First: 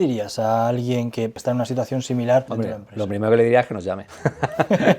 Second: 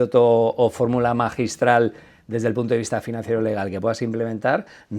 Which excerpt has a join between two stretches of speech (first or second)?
first